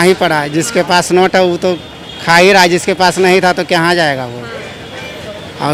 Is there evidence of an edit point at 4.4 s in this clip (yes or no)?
no